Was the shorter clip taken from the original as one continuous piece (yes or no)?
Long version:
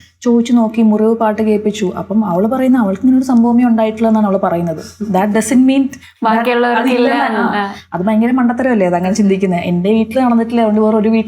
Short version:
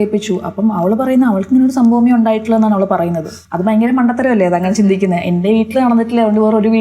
no